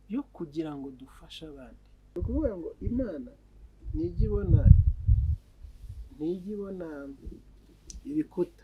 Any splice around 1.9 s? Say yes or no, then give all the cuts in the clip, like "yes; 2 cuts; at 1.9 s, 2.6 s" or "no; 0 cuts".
yes; 1 cut; at 1.9 s